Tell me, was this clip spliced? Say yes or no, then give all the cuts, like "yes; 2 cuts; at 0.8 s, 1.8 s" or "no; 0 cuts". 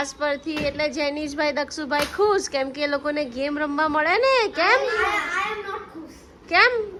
no; 0 cuts